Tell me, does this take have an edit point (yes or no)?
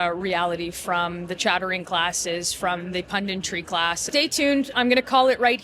yes